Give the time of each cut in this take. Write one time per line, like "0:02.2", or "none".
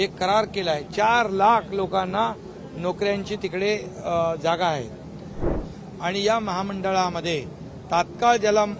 0:05.5

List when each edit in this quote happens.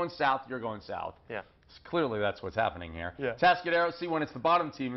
0:03.4

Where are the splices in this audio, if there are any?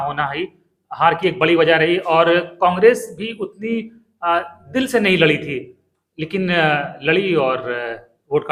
none

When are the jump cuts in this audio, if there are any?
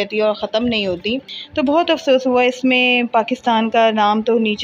0:01.3

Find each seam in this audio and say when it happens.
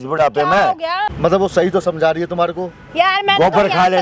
0:01.1

